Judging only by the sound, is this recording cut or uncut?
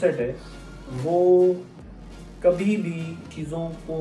uncut